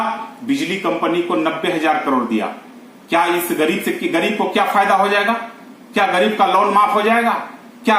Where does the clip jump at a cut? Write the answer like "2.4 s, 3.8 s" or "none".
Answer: none